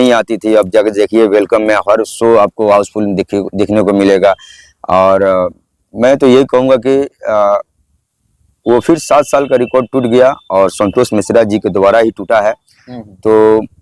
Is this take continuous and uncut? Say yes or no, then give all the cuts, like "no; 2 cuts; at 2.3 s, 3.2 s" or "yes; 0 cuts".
yes; 0 cuts